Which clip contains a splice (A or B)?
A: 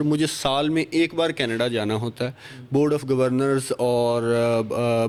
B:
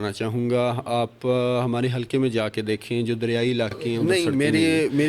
B